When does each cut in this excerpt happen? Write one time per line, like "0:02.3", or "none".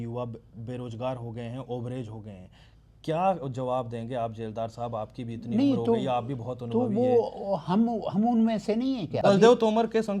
0:09.1